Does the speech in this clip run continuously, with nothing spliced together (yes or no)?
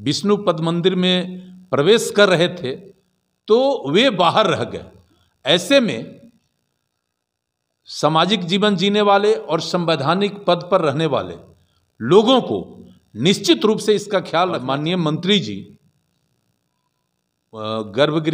no